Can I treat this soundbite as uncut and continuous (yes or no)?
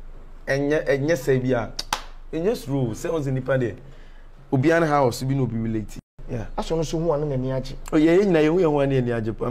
no